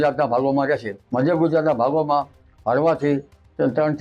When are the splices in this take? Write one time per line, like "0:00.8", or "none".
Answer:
0:01.0